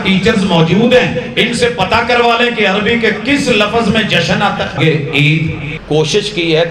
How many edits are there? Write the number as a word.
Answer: two